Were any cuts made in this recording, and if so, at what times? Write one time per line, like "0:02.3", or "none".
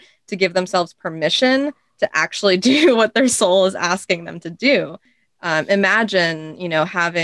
0:05.0